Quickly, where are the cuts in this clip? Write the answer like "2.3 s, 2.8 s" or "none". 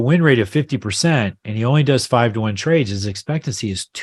none